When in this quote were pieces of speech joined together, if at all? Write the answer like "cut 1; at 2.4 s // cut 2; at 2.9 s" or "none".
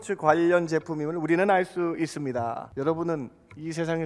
cut 1; at 2.6 s